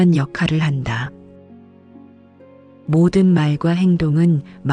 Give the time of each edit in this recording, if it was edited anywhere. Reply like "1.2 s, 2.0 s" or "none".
1.1 s, 2.8 s

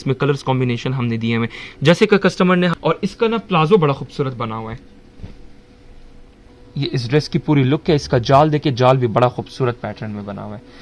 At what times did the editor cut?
2.7 s, 6.6 s

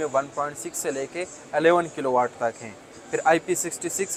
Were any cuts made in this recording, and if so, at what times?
none

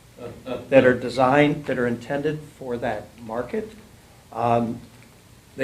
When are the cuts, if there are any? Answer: 3.6 s

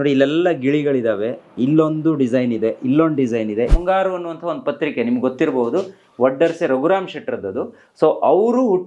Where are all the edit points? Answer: 3.7 s

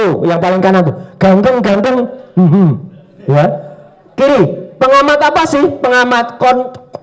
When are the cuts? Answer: none

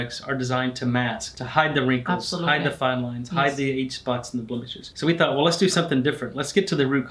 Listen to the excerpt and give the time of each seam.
1.3 s, 4.8 s

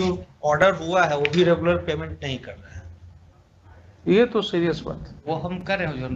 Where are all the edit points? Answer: none

